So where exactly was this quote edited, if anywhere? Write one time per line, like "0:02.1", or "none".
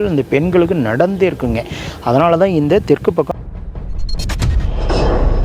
0:03.3